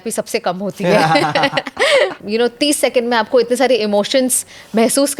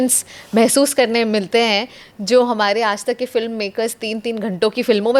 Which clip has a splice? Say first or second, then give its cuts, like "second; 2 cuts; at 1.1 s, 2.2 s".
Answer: first; 1 cut; at 2.2 s